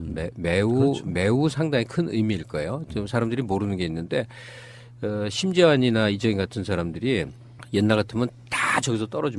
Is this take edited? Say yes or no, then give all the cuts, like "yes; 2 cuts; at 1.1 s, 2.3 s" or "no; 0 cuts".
no; 0 cuts